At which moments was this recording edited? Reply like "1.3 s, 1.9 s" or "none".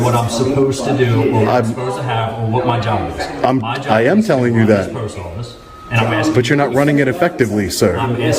none